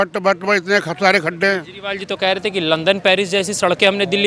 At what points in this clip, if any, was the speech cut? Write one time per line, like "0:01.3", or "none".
none